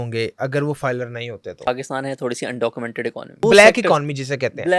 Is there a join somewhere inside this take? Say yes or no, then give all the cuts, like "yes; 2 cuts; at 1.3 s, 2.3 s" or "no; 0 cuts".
yes; 2 cuts; at 1.7 s, 3.4 s